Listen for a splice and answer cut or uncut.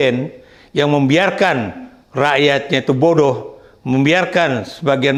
uncut